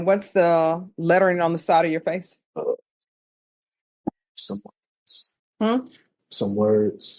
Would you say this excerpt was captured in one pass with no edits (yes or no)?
no